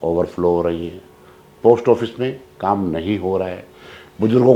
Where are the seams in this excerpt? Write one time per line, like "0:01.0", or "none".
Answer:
none